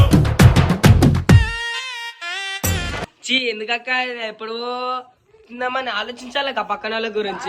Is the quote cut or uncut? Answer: uncut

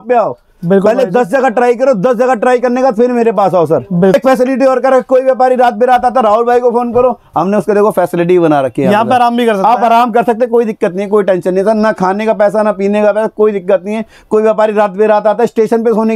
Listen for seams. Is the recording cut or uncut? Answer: cut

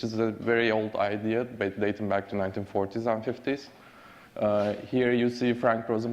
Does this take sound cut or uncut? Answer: cut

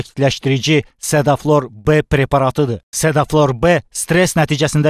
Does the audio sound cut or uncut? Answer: uncut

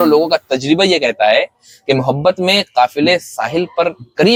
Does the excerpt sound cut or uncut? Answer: uncut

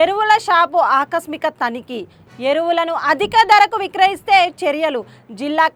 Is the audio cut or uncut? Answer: uncut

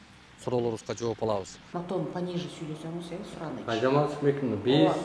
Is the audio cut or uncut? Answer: cut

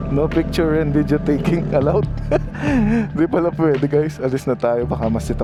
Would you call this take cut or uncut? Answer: uncut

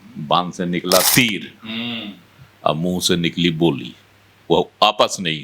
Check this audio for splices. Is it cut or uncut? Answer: cut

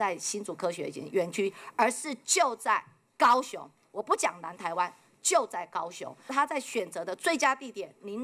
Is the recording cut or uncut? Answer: cut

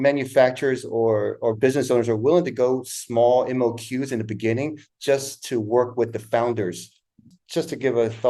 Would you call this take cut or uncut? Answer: cut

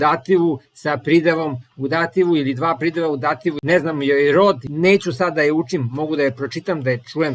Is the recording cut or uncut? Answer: cut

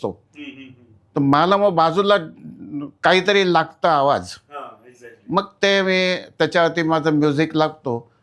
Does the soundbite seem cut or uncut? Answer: uncut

